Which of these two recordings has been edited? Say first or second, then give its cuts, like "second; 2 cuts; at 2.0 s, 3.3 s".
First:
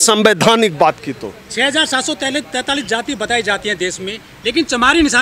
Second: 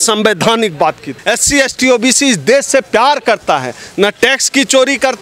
second; 1 cut; at 1.1 s